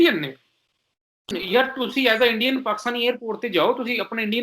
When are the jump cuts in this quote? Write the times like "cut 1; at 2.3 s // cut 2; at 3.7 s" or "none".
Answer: cut 1; at 1.3 s